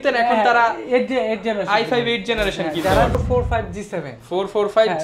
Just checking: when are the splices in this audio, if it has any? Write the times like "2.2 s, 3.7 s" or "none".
3.2 s